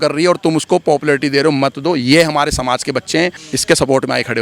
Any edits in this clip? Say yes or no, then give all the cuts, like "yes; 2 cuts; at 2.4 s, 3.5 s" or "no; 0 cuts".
yes; 1 cut; at 3.4 s